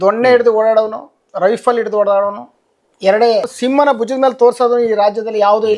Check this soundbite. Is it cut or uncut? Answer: cut